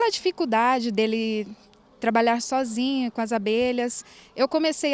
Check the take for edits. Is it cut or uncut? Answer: uncut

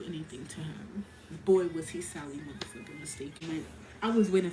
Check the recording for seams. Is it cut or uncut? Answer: cut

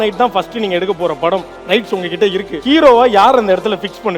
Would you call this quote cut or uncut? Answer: cut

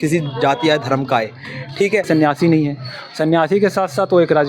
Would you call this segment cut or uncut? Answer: cut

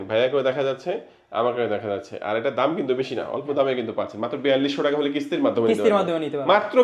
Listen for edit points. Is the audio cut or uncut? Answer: uncut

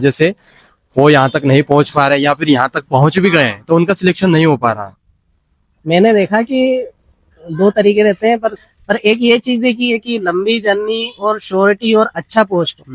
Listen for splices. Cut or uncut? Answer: cut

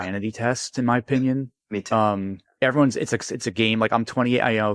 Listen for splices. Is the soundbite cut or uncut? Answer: uncut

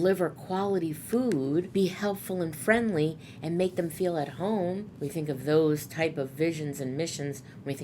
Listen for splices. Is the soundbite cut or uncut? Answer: cut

